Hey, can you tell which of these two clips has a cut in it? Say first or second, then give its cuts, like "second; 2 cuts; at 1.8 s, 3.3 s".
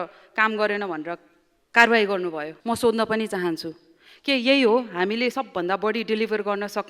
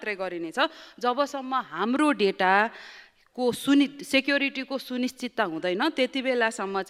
first; 1 cut; at 2.5 s